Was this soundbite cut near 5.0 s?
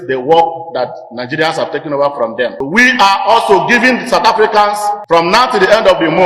yes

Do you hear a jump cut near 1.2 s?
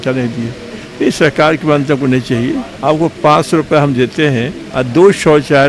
no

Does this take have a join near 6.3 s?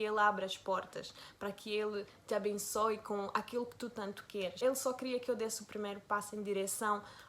no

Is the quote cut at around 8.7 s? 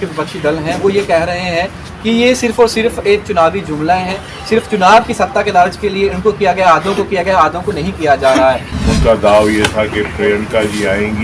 yes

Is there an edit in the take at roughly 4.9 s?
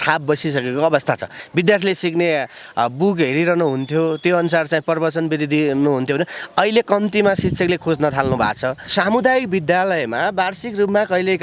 no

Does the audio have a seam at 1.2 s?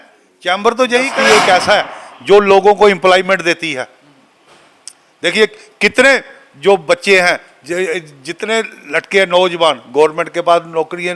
yes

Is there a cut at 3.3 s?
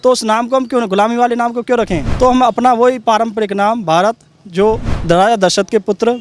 no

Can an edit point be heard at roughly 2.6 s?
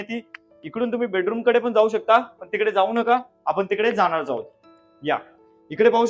no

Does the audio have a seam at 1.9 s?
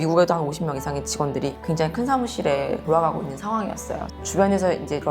no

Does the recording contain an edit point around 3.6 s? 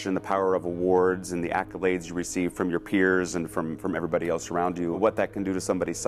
no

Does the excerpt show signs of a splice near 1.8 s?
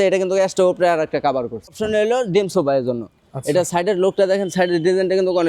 yes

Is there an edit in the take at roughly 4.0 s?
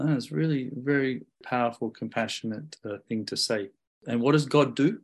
yes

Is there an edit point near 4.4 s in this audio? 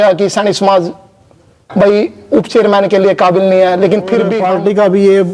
yes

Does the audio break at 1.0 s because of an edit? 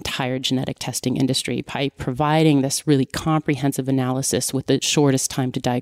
no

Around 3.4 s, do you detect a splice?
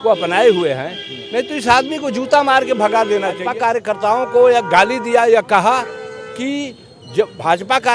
yes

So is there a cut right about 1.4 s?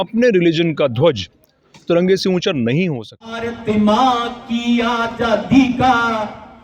no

